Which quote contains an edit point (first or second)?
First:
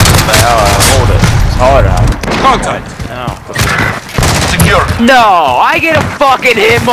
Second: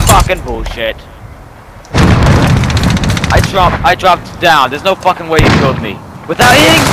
first